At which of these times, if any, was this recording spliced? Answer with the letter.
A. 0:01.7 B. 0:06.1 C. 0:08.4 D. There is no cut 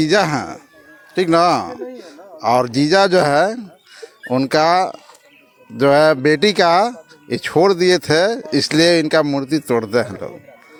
D